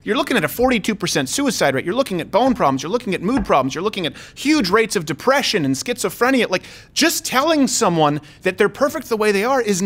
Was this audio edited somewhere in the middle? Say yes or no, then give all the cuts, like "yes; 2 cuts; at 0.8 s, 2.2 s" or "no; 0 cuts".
no; 0 cuts